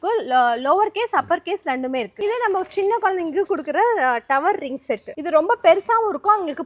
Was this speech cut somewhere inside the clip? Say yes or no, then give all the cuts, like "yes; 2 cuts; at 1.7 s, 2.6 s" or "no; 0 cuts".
yes; 1 cut; at 2.1 s